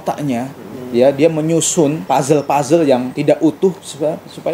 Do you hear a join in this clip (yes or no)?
yes